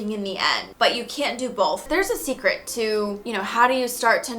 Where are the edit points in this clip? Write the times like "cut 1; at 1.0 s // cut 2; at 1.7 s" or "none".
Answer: cut 1; at 1.8 s